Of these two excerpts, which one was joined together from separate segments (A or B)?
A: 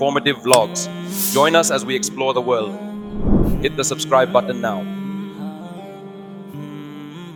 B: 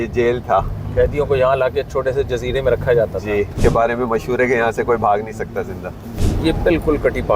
B